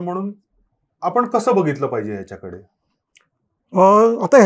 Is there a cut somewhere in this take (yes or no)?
no